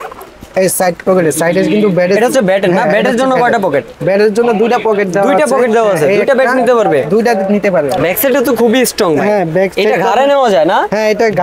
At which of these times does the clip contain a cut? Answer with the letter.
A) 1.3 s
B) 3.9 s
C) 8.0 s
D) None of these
C